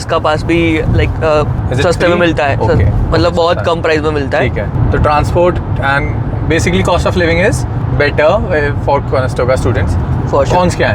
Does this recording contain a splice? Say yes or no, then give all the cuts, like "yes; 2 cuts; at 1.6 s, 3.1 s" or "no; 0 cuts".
no; 0 cuts